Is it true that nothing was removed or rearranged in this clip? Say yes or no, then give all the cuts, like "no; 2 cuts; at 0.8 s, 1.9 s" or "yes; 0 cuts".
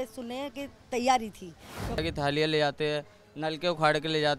no; 1 cut; at 2.0 s